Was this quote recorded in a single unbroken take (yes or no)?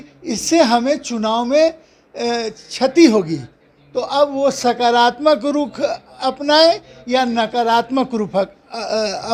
yes